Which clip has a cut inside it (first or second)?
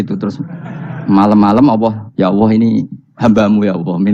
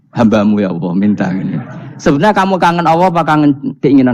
first